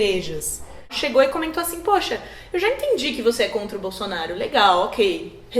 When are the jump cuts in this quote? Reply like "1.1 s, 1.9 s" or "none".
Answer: 1.0 s